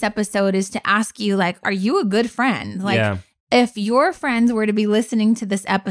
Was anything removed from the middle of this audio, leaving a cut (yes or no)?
yes